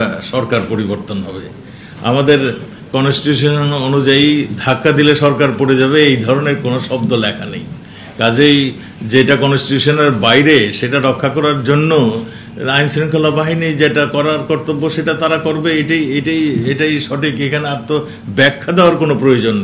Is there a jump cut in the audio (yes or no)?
no